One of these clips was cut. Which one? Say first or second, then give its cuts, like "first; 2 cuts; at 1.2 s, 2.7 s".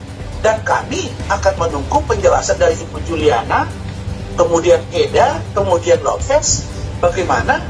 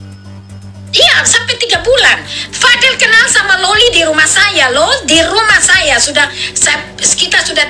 second; 1 cut; at 0.9 s